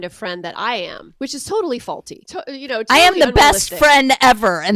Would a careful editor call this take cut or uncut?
cut